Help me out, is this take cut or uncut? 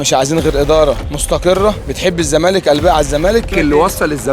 cut